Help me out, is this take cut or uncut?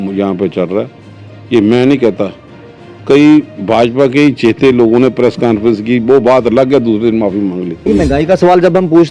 cut